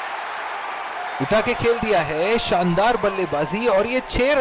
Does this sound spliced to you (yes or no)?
no